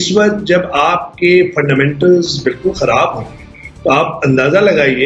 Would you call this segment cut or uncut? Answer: uncut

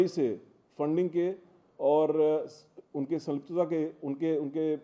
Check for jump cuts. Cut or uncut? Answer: uncut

